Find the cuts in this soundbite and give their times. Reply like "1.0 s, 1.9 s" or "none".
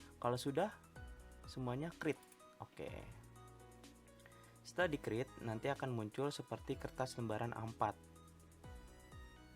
3.1 s, 4.7 s, 8.0 s